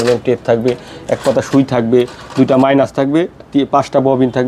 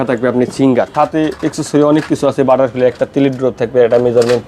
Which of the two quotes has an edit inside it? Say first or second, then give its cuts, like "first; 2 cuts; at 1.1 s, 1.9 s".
second; 1 cut; at 0.9 s